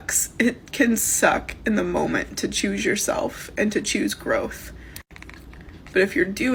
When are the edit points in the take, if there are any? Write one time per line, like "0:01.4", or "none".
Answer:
none

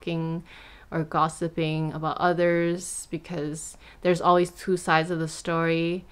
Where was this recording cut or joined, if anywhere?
none

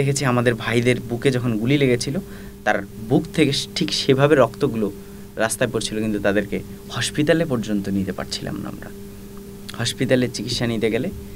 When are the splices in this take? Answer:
none

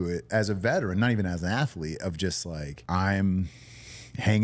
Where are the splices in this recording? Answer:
0:02.7

